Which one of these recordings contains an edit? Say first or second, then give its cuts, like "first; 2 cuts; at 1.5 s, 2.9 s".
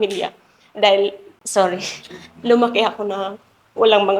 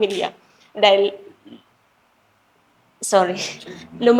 first; 1 cut; at 1.3 s